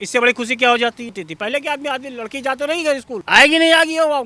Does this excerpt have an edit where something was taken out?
yes; 2 cuts; at 1.2 s, 3.1 s

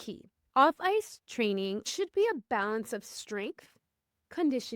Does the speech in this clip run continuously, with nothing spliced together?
no; 1 cut; at 1.8 s

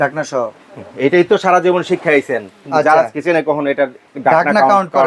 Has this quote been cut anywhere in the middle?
no; 0 cuts

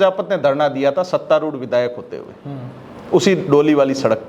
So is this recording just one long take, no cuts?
yes; 0 cuts

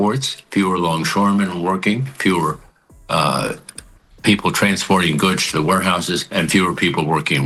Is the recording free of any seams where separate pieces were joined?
yes; 0 cuts

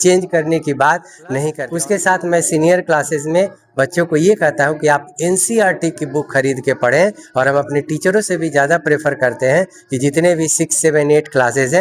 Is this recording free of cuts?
no; 1 cut; at 1.5 s

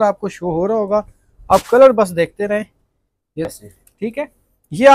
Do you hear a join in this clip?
yes; 1 cut; at 3.5 s

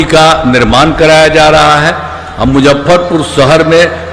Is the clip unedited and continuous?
yes; 0 cuts

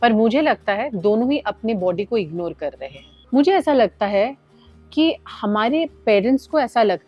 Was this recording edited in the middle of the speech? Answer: no; 0 cuts

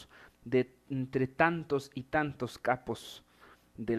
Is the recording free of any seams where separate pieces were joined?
yes; 0 cuts

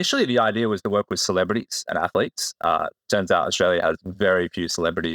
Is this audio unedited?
yes; 0 cuts

